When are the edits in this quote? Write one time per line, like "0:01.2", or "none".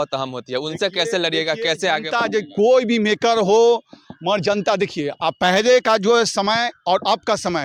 none